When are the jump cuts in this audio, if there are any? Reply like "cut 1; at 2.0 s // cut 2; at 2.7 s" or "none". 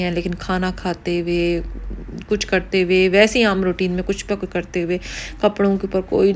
none